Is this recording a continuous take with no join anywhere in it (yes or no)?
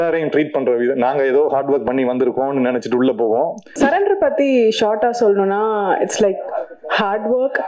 no